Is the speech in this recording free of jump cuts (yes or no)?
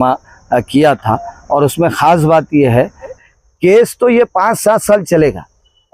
no